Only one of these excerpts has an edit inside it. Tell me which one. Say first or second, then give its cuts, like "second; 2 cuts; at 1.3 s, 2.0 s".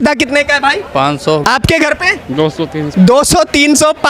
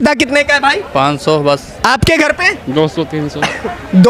first; 2 cuts; at 1.4 s, 2.9 s